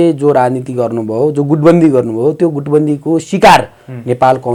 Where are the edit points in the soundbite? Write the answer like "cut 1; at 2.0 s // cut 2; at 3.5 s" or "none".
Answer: none